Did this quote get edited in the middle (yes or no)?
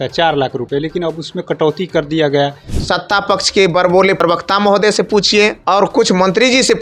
yes